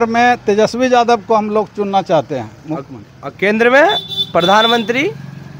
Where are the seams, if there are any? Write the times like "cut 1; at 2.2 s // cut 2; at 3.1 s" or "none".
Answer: none